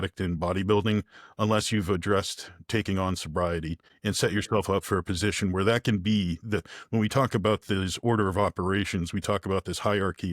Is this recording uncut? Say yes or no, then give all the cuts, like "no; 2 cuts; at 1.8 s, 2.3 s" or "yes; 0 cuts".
no; 1 cut; at 3.8 s